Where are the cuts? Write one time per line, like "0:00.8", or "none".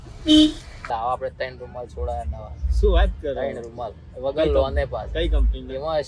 0:00.9